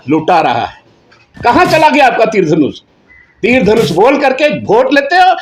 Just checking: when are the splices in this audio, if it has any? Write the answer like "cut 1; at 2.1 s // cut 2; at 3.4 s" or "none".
cut 1; at 1.3 s